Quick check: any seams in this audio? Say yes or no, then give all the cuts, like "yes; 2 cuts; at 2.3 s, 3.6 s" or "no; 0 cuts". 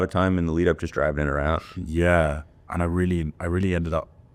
no; 0 cuts